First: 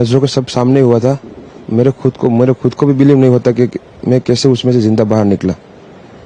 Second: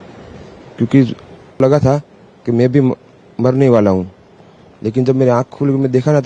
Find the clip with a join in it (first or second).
second